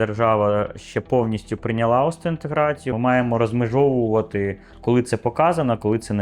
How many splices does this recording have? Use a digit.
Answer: 1